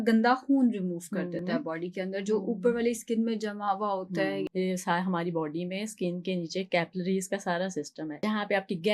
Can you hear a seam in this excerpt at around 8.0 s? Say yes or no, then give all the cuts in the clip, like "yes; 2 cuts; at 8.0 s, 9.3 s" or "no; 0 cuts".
yes; 2 cuts; at 4.4 s, 8.0 s